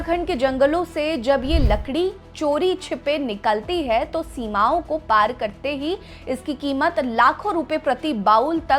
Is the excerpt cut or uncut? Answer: uncut